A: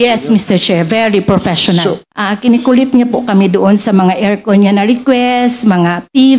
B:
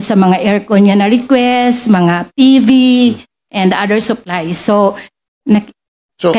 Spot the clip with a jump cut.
A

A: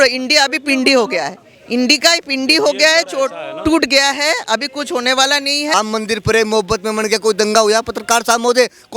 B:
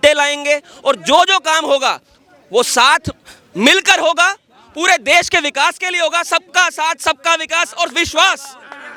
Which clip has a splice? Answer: A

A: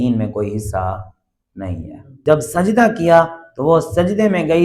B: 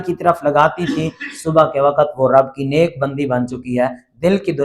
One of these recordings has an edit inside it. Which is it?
A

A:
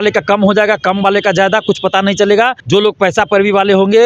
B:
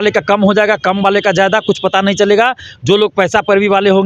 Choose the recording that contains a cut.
A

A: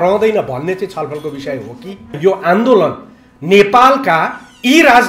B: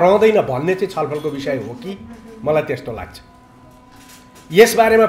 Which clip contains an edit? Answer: A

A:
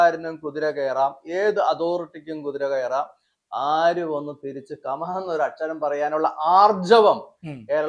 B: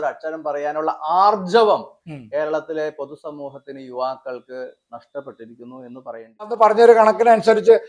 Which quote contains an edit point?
B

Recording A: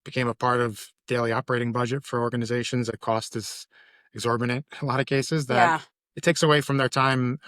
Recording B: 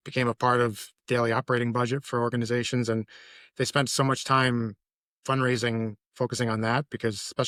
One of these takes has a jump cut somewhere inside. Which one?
A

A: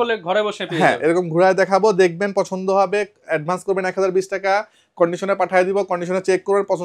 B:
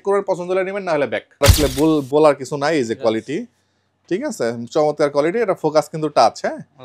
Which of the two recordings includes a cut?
B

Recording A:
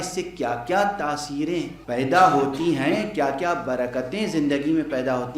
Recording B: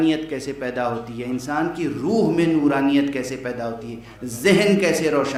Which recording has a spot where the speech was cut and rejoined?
A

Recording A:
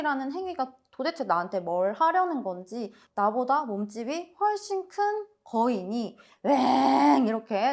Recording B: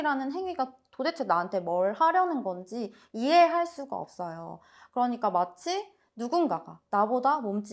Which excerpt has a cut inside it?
A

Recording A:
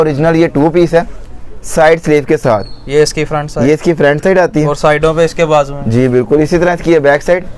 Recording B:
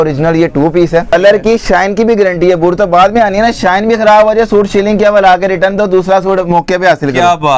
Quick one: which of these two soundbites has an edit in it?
B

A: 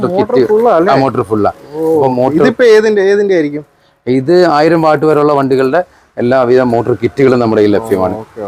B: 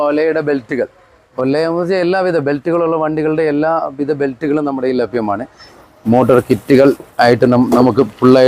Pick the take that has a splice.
B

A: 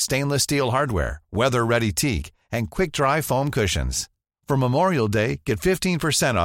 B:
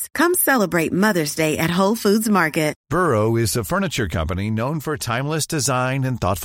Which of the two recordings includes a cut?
B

